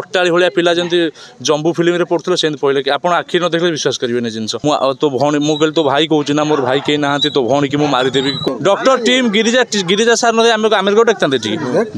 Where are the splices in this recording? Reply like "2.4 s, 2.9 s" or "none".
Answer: 4.5 s, 8.5 s

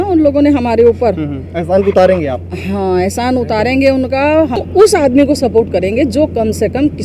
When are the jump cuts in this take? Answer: 4.6 s

